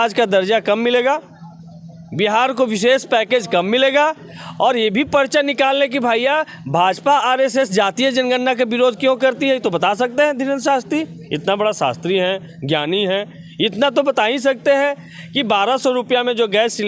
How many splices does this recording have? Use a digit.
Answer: 0